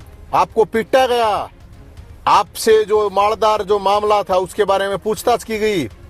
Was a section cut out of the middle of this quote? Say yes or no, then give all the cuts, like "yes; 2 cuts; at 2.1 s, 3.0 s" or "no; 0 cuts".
no; 0 cuts